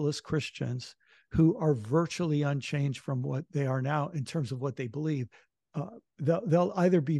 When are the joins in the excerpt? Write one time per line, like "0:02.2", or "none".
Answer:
0:05.4

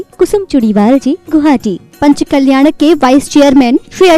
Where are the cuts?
0:01.8

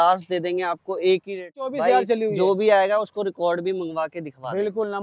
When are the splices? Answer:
0:01.7

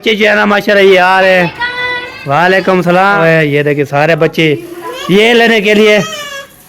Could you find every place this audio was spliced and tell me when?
0:03.2

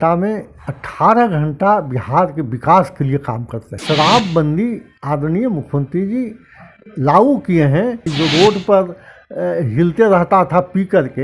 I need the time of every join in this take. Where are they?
0:03.8
0:08.1

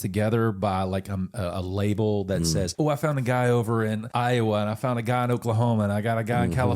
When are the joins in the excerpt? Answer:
0:02.7
0:04.1

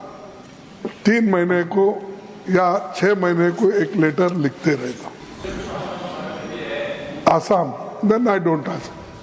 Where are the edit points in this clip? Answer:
0:05.4

